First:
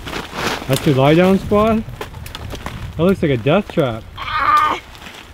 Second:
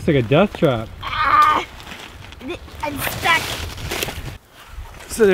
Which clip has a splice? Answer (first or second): second